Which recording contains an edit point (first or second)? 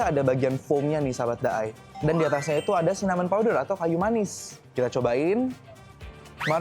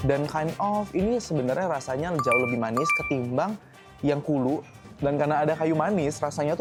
first